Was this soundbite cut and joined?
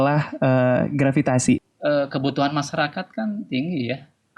yes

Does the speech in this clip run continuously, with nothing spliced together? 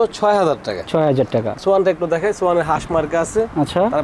no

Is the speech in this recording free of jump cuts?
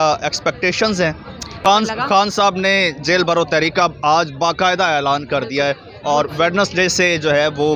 no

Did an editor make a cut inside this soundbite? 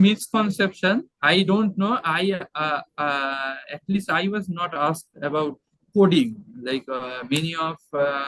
no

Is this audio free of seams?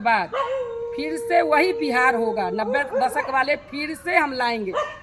yes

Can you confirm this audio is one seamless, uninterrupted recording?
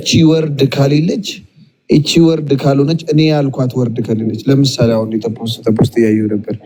yes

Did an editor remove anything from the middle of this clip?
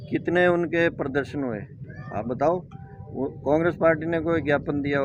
no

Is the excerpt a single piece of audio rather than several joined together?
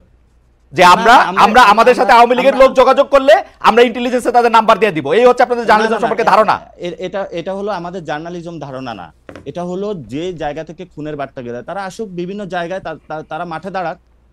yes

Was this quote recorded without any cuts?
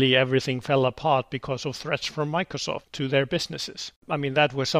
no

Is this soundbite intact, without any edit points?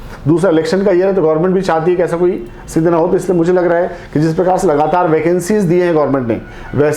yes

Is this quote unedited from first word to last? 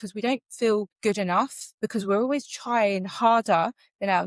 no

